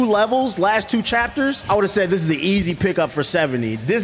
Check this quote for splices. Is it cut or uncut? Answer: cut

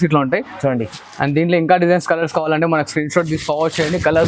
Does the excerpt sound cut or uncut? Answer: cut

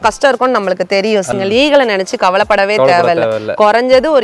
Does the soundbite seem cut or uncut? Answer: cut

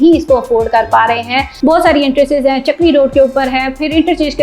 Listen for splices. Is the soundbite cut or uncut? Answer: cut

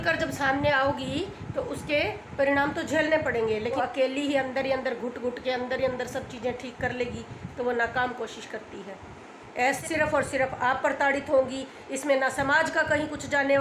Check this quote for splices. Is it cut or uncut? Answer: cut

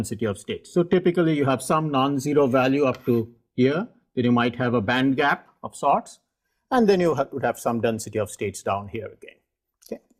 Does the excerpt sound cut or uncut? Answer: cut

